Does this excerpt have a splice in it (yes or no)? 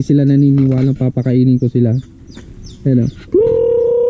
no